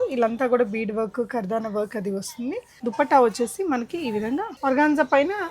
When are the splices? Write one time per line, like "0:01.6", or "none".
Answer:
0:02.8
0:04.5

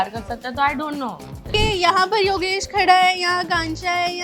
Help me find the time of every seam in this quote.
0:01.5

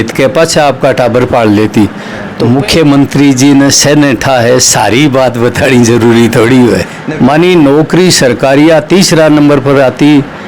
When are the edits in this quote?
0:02.4
0:07.0

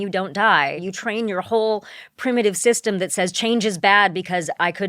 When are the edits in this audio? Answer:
0:00.9

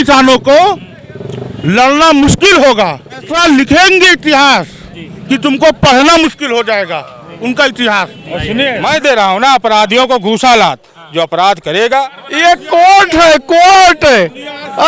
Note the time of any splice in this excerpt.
0:03.3
0:08.8
0:12.2

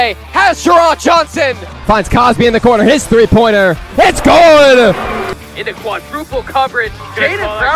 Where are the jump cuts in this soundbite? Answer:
0:01.7
0:05.4

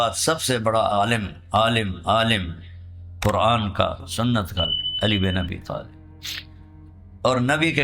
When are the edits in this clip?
0:00.9

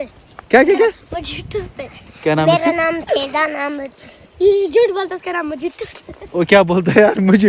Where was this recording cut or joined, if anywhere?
none

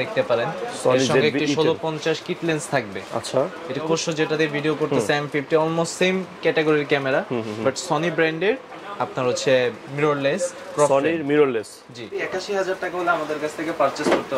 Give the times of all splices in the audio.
0:03.8
0:12.1

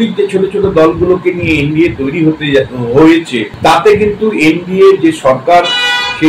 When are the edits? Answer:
0:03.4

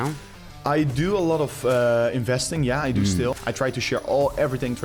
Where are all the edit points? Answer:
0:03.4

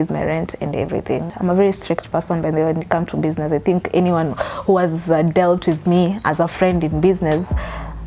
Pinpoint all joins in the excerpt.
0:01.3

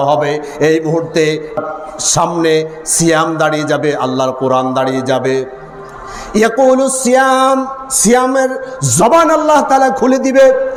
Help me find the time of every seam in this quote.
none

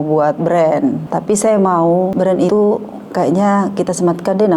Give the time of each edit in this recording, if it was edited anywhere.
0:01.1
0:02.4

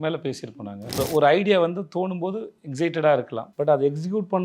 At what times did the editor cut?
0:01.0
0:03.4

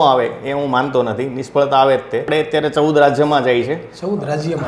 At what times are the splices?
0:02.3

